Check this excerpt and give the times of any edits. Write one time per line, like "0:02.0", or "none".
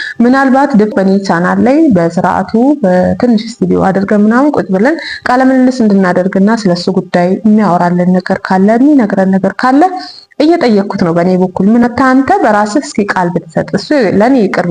0:00.9
0:11.9

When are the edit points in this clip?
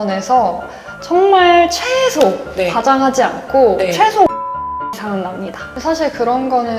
0:05.6

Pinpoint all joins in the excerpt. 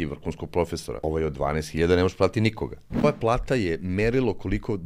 0:01.0
0:03.0

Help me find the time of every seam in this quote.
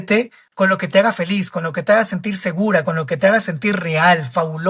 none

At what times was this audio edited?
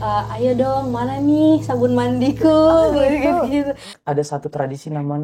0:03.9

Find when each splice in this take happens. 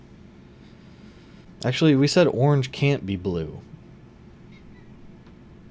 0:01.4

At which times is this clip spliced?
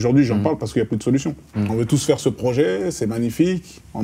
0:01.4

